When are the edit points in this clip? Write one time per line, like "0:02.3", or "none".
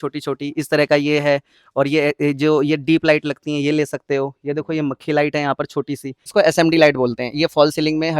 0:06.2